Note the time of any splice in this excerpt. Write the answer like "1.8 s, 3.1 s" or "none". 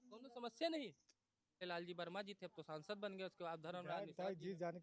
1.6 s

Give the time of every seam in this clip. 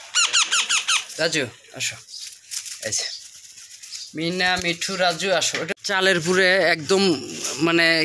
5.7 s

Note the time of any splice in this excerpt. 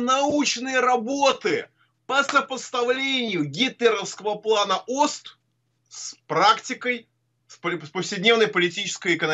none

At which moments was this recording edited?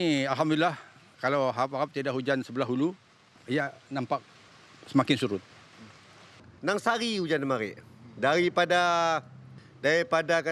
6.5 s

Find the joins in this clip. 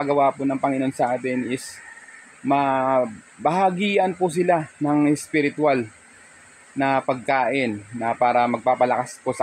none

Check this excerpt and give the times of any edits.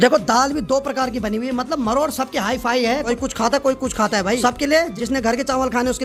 none

